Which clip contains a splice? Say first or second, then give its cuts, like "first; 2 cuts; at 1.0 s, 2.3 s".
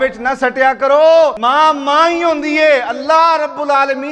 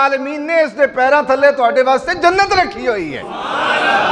first; 1 cut; at 1.4 s